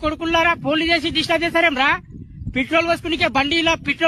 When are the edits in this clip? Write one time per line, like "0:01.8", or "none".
none

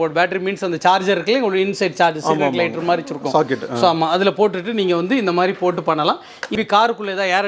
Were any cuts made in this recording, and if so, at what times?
0:06.5

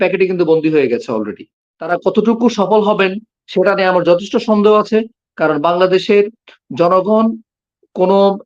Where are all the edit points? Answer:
0:01.9

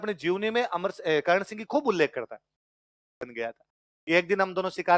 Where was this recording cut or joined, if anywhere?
0:03.2

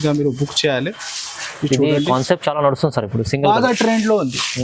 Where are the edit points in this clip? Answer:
none

